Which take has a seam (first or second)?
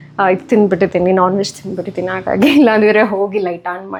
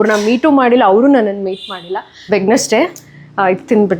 second